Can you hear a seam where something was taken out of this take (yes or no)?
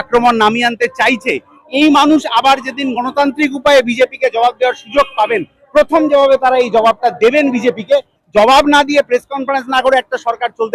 yes